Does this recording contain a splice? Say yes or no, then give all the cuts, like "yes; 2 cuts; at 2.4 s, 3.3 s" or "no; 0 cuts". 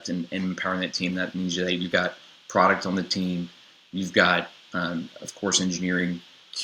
no; 0 cuts